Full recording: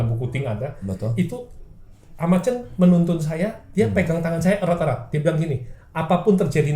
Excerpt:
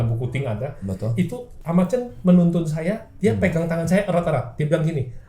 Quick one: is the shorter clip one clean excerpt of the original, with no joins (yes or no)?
no